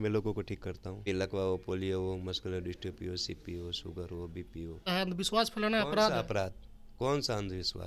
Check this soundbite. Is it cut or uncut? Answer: cut